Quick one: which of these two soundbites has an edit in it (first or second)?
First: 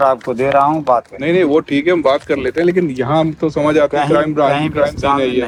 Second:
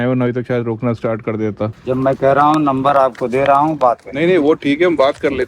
second